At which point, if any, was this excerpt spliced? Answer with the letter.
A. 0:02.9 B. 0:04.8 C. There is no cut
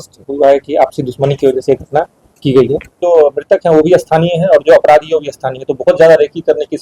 A